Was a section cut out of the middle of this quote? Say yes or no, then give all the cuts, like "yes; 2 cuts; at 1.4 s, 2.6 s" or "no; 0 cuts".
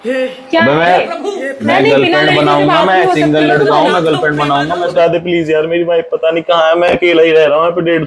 yes; 1 cut; at 4.9 s